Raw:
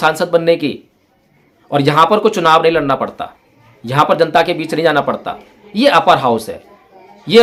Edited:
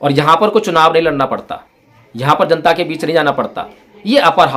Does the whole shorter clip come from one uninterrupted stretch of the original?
yes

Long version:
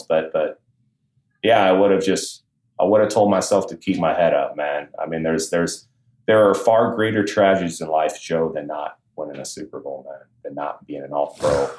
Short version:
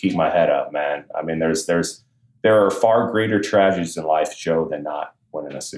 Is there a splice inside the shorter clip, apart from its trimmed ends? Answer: no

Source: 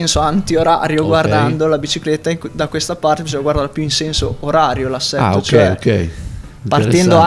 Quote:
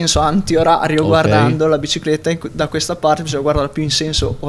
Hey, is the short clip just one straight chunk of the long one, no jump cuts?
yes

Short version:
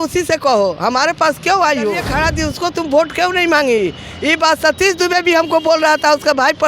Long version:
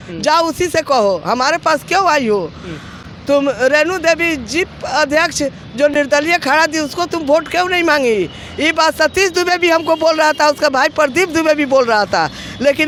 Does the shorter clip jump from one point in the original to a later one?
yes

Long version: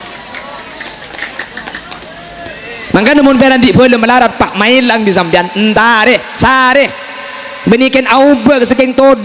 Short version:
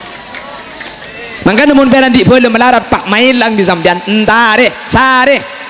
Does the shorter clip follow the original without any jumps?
no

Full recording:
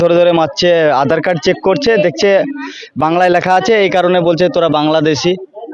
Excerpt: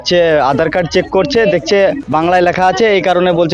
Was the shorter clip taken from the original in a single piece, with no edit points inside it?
no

